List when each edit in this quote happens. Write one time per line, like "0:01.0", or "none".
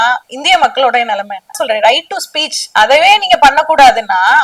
0:01.6